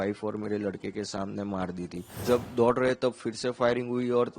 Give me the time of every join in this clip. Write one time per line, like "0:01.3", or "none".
0:02.1